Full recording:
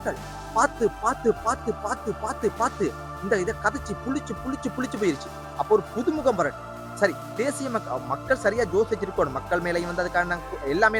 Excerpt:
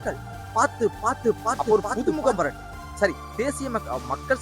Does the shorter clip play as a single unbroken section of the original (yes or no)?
no